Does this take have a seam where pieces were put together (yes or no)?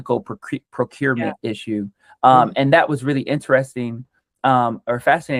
no